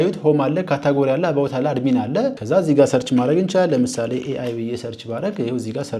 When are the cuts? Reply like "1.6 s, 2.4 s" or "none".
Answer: 2.4 s